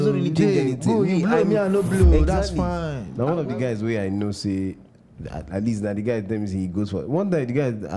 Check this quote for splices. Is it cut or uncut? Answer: cut